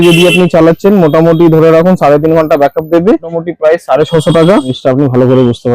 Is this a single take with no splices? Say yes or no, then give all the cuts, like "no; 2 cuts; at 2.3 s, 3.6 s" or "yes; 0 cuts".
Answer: no; 2 cuts; at 3.3 s, 4.8 s